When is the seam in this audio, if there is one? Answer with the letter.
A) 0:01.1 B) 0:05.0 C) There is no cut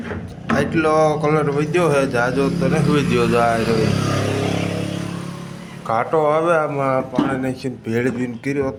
C